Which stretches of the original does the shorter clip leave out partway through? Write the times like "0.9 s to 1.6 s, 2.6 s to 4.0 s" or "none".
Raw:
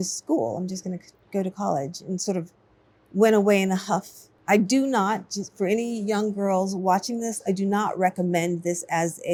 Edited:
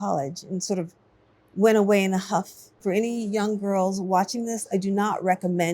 4.2 s to 5.4 s